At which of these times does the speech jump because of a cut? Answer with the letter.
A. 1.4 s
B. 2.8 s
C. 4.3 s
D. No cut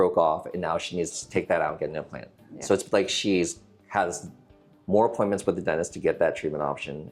D